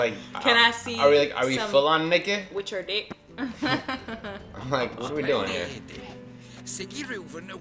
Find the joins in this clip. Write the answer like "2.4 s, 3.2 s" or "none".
none

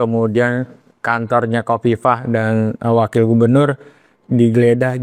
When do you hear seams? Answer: none

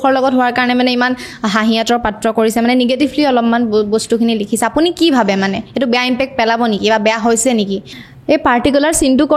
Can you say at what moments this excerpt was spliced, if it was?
7.9 s

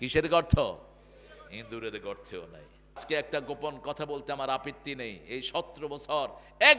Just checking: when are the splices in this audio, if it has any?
3.0 s

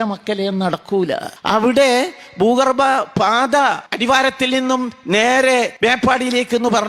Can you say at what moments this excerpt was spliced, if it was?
1.3 s, 3.9 s, 5.7 s

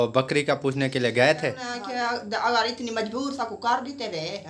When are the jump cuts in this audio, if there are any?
1.7 s

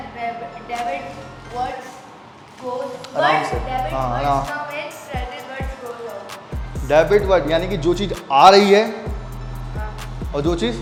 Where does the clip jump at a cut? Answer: none

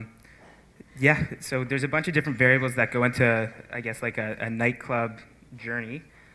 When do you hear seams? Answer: none

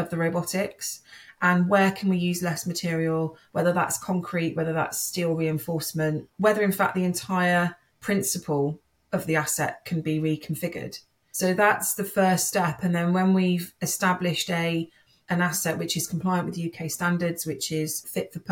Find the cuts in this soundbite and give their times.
none

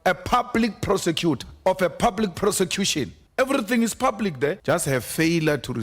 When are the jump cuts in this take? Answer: 1.5 s, 3.2 s, 4.6 s

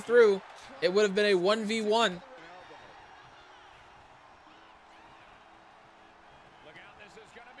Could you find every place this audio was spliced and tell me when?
2.4 s

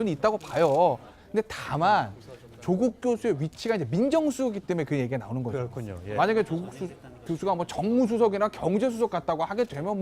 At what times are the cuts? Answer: 2.4 s

